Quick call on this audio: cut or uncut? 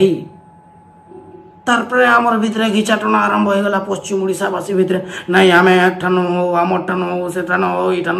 uncut